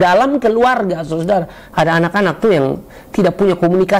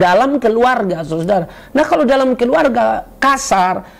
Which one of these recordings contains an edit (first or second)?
first